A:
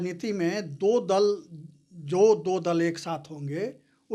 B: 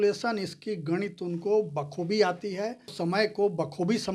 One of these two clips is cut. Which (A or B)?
B